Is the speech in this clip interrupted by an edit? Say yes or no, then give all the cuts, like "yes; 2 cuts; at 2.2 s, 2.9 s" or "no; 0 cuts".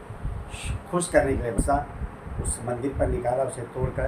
yes; 1 cut; at 1.5 s